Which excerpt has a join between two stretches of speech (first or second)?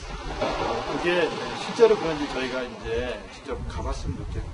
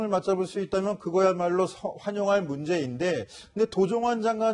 first